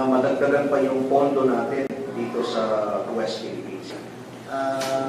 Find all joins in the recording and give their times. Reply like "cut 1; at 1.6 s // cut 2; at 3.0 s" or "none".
cut 1; at 3.9 s